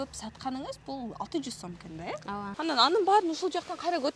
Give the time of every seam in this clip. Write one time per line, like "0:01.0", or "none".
0:02.6